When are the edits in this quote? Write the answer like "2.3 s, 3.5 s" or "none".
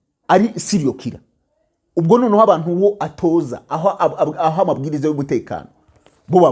none